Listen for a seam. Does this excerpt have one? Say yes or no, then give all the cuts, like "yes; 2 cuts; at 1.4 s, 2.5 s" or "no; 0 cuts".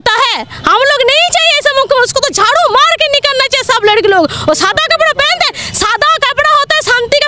no; 0 cuts